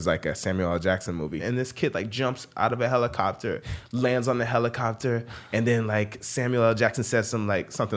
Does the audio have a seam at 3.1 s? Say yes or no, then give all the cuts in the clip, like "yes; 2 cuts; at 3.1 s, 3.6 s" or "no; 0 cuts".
no; 1 cut; at 1.4 s